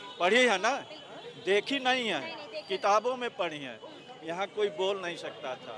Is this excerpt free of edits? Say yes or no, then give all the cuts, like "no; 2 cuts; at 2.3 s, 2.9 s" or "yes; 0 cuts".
yes; 0 cuts